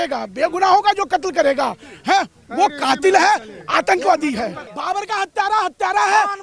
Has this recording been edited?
yes; 1 cut; at 4.7 s

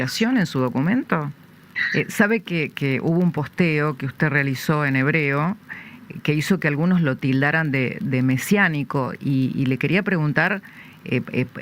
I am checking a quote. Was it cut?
yes; 1 cut; at 1.7 s

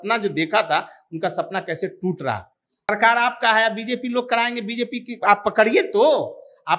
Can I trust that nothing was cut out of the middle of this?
no; 1 cut; at 2.9 s

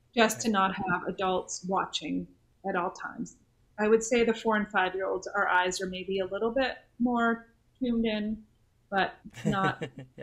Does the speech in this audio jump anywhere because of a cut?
yes; 2 cuts; at 2.5 s, 9.2 s

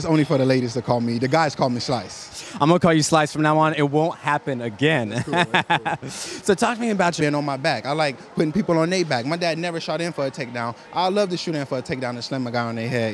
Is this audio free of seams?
yes; 0 cuts

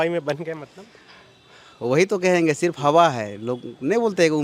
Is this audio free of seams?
yes; 0 cuts

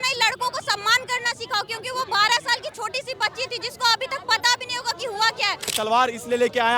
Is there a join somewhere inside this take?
yes; 1 cut; at 5.7 s

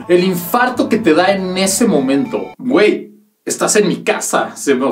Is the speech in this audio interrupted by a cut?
yes; 1 cut; at 2.5 s

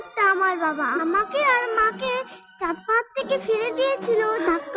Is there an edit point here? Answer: no; 0 cuts

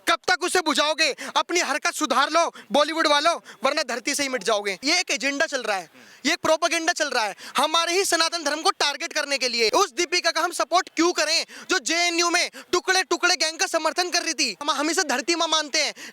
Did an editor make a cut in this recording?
yes; 3 cuts; at 4.8 s, 9.7 s, 14.7 s

